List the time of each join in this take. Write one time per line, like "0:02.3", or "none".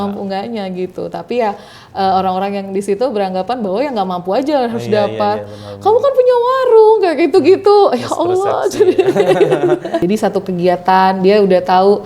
0:10.0